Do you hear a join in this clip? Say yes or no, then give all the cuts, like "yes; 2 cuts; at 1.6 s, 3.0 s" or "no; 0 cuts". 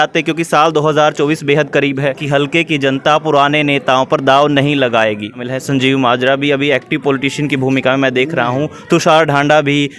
yes; 2 cuts; at 2.2 s, 5.5 s